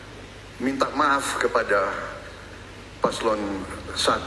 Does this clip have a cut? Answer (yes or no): no